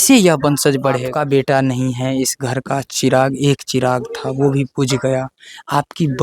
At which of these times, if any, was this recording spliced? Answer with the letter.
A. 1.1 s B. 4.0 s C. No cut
A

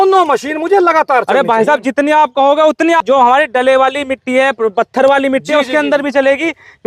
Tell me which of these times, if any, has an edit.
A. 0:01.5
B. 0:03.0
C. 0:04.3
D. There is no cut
B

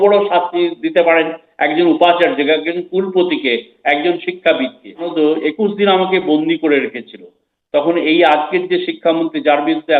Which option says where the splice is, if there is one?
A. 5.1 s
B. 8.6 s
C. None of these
A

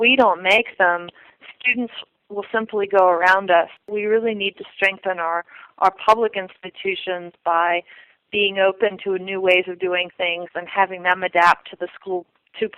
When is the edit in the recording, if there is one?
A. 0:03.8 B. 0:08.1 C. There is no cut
A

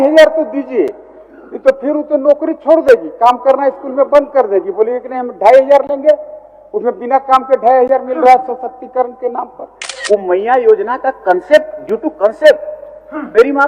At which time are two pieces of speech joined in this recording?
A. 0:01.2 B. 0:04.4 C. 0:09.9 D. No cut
C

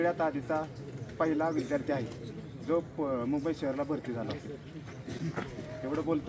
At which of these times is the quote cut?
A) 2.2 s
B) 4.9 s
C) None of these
C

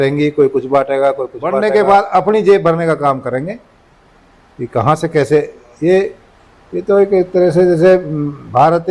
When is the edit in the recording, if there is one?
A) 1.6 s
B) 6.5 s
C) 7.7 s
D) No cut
A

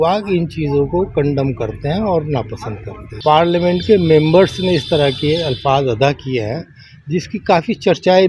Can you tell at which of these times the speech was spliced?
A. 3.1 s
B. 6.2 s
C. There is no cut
A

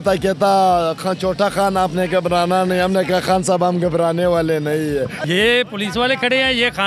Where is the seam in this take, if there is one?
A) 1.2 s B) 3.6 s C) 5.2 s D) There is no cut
C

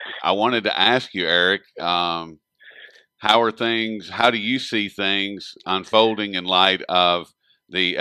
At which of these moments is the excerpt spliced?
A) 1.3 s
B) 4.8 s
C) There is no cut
A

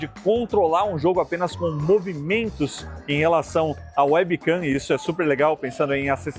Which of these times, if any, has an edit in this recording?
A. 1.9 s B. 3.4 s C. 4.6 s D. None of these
D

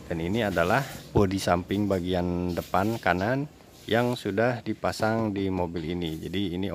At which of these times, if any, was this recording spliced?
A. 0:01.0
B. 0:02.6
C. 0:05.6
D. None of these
A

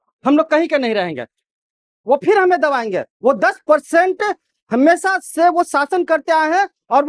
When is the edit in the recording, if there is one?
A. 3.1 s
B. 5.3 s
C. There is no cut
C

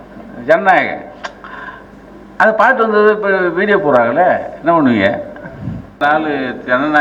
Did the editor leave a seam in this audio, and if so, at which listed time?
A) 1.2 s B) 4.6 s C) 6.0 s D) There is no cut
C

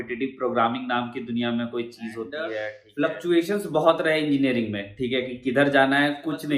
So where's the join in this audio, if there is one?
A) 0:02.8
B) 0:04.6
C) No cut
A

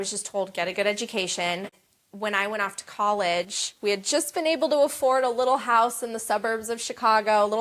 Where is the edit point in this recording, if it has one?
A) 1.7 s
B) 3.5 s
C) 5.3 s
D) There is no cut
A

